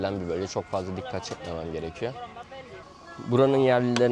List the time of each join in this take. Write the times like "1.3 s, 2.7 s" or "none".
2.9 s